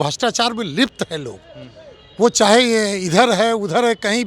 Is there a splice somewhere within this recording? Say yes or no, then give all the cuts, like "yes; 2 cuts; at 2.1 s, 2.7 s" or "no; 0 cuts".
no; 0 cuts